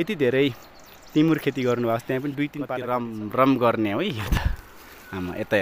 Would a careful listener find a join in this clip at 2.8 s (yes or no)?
yes